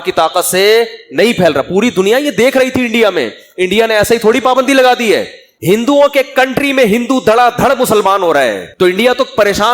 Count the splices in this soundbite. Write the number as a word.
one